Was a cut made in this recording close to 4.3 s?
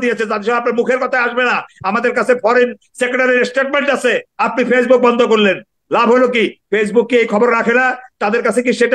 yes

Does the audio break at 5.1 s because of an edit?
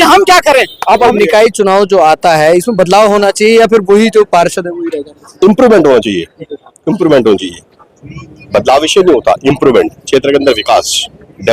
no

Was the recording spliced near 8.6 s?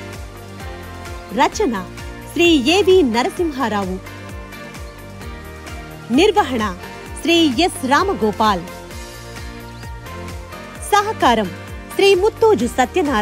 yes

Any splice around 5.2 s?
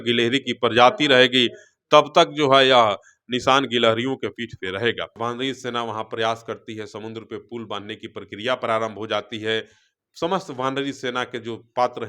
yes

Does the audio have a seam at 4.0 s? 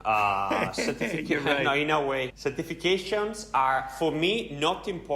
no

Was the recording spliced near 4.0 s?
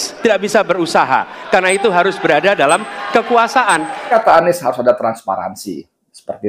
yes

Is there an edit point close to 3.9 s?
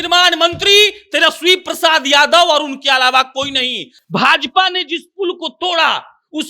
yes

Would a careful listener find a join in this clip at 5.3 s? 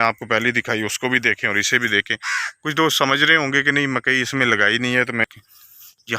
yes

